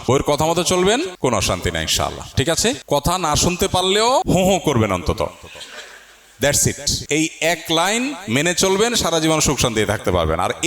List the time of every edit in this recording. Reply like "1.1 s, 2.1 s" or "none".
1.1 s, 2.8 s, 4.2 s, 6.9 s

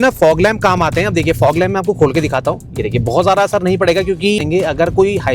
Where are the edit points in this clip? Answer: 4.4 s

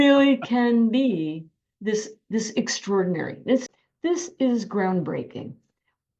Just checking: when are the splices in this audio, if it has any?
3.6 s

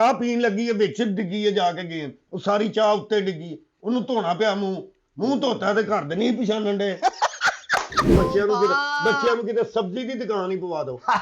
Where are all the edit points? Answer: 8.1 s

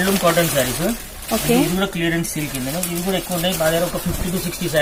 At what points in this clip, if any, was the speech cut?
none

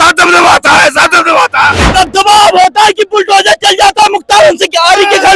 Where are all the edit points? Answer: 1.9 s

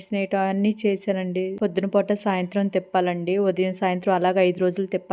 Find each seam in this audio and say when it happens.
1.5 s

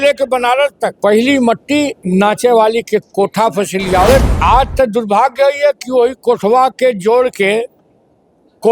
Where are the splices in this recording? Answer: 1.0 s, 2.0 s, 4.3 s

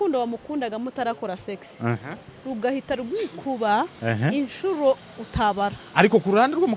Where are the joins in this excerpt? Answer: none

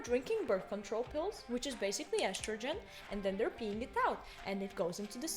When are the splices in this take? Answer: none

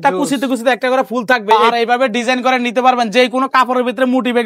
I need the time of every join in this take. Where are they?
1.5 s

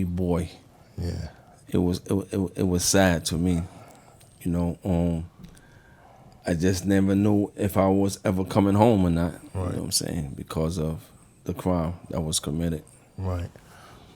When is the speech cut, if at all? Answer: none

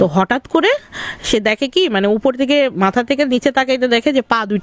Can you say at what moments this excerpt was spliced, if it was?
none

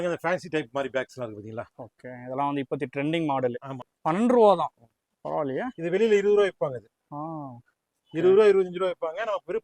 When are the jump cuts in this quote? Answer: 3.9 s

